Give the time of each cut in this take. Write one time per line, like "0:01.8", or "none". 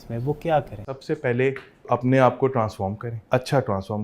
0:00.9
0:01.9
0:03.1